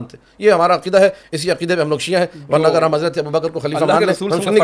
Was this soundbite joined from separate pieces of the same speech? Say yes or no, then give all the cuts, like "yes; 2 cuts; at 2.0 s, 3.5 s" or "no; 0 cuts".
no; 0 cuts